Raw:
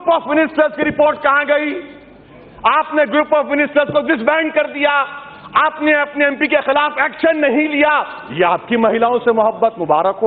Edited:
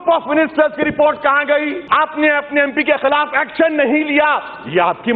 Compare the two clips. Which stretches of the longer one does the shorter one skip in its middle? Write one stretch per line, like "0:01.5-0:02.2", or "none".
0:01.8-0:05.4